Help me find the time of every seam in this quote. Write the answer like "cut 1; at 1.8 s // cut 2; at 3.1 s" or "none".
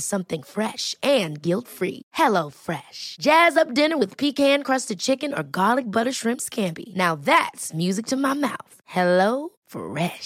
none